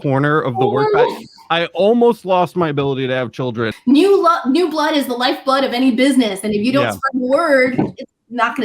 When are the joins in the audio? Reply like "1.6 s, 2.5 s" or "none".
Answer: 3.7 s